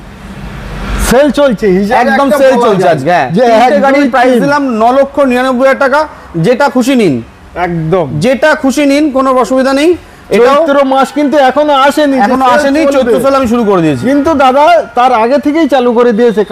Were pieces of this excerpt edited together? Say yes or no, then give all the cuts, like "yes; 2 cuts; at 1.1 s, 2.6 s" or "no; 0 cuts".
no; 0 cuts